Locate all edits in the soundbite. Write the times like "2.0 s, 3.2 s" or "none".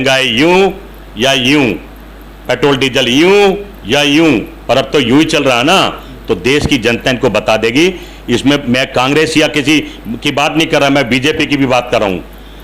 none